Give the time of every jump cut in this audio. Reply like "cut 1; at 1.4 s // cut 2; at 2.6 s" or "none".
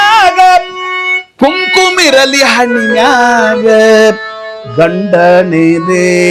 none